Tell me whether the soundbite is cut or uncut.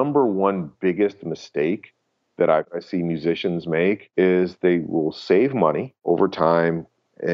cut